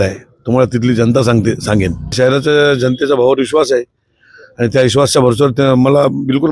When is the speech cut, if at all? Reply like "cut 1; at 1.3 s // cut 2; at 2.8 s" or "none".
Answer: cut 1; at 2.1 s